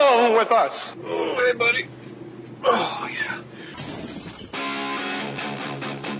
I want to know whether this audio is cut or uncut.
uncut